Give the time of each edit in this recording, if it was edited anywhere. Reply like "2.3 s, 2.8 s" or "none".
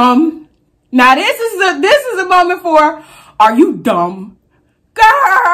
4.5 s